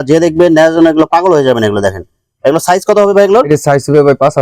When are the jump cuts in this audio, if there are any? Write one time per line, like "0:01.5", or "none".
none